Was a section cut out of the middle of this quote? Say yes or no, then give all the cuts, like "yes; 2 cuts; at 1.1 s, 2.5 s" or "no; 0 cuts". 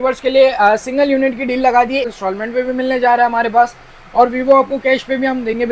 yes; 1 cut; at 2.1 s